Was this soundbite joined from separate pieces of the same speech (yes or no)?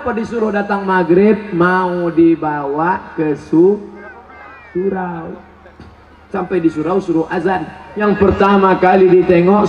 yes